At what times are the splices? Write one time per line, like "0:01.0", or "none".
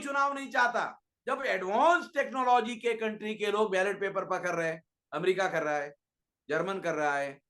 0:01.1